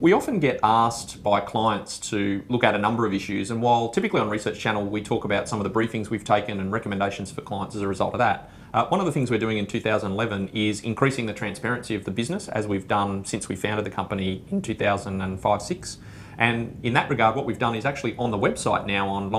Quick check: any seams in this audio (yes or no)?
no